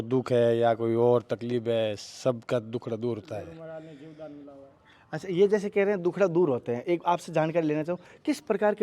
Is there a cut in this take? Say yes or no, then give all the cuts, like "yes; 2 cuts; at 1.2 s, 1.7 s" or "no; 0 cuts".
no; 0 cuts